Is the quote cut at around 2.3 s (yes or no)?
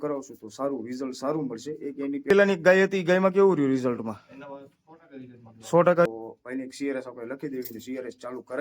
yes